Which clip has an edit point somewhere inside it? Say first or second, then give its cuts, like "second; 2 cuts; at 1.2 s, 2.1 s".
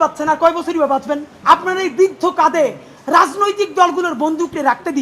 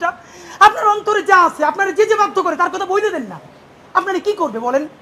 first; 1 cut; at 1.3 s